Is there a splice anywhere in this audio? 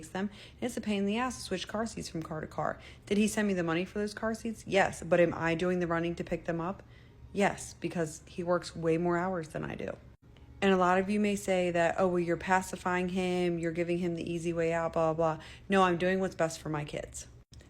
yes; 2 cuts; at 5.5 s, 10.8 s

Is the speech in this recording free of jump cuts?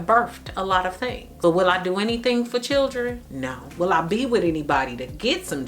no; 1 cut; at 1.3 s

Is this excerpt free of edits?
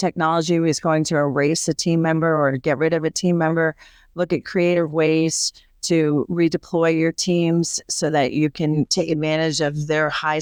yes; 0 cuts

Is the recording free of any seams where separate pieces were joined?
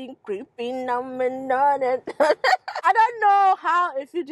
no; 1 cut; at 2.7 s

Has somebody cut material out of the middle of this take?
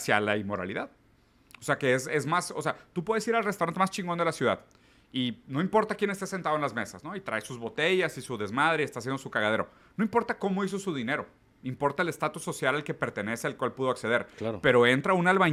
no; 0 cuts

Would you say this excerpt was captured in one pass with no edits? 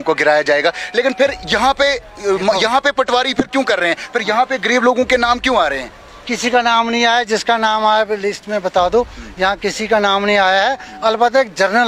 yes; 0 cuts

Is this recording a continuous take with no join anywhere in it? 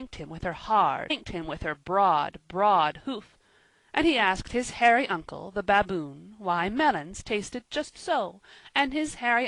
yes; 0 cuts

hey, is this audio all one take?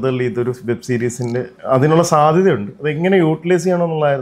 yes; 0 cuts

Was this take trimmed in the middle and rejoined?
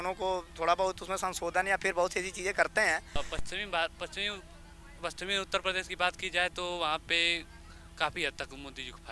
yes; 1 cut; at 3.2 s

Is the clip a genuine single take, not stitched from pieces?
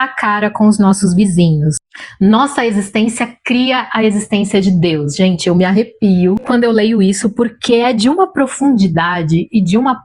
yes; 0 cuts

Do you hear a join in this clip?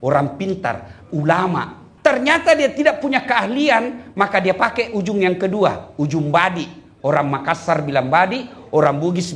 yes; 1 cut; at 1.9 s

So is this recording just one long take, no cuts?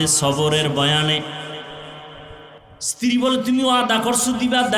no; 1 cut; at 2.6 s

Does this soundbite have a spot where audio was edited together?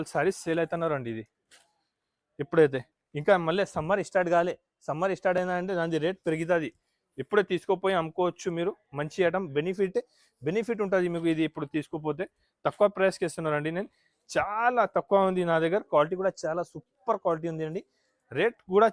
no; 0 cuts

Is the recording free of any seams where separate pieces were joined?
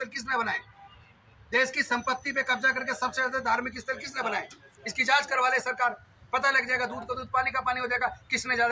yes; 0 cuts

